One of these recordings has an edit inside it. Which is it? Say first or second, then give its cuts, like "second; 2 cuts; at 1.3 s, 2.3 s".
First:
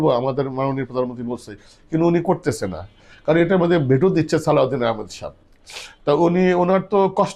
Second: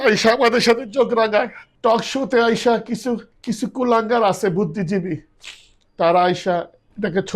second; 2 cuts; at 1.6 s, 3.3 s